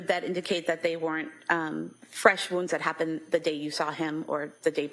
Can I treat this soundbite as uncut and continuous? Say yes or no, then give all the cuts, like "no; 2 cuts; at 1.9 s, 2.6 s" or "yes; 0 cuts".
yes; 0 cuts